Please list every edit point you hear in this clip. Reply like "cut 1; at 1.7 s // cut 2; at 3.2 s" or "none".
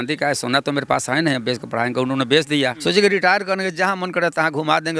cut 1; at 2.8 s